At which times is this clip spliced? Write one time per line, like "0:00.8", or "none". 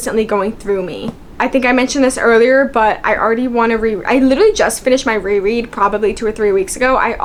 none